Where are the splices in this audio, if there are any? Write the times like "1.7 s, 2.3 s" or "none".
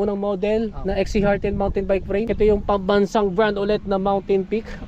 2.3 s